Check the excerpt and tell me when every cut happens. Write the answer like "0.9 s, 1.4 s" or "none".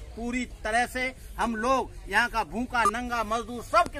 none